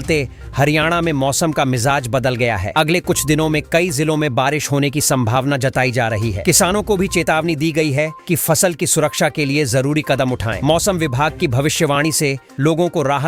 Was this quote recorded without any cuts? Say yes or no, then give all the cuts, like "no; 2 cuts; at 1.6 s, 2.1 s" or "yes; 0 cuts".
yes; 0 cuts